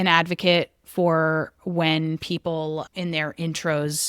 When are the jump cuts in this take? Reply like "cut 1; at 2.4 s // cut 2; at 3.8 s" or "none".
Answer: none